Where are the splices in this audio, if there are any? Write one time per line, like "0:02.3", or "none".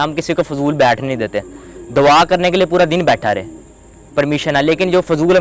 none